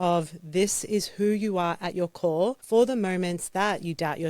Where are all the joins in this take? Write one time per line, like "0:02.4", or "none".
0:02.6